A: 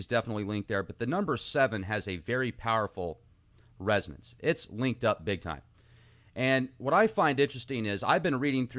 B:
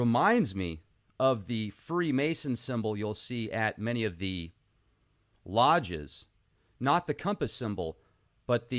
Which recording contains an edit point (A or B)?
B